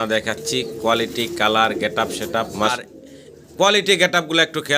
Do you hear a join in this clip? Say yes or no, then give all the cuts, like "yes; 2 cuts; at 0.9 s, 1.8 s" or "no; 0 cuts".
yes; 1 cut; at 2.7 s